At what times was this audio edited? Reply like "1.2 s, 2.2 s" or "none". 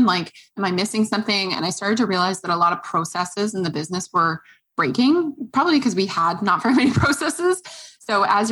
none

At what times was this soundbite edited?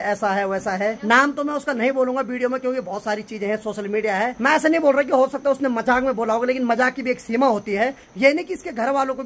1.0 s, 4.4 s, 8.0 s

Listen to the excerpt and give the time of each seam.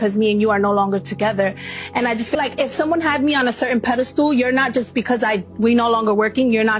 2.4 s

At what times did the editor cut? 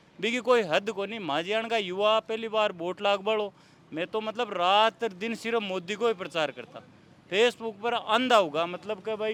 none

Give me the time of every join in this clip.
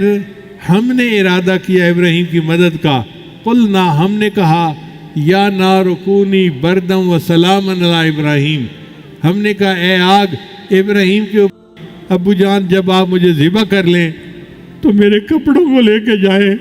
11.6 s

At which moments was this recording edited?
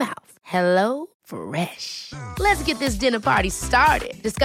none

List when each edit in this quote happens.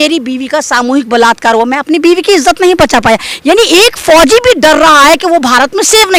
none

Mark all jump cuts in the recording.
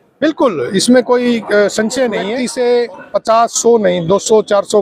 2.4 s

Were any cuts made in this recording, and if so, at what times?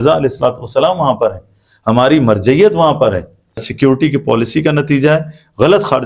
3.7 s

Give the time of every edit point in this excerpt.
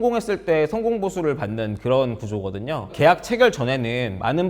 2.9 s

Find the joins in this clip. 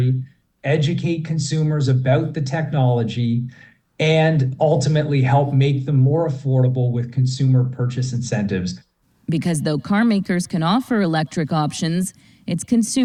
none

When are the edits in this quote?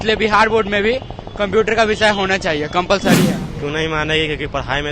3.5 s

